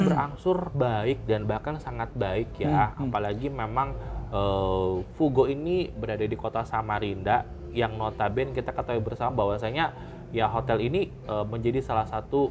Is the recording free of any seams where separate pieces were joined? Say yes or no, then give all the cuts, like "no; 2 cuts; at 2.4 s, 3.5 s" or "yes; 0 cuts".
yes; 0 cuts